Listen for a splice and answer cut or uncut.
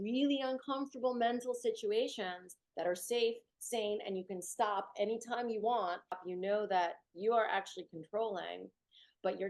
cut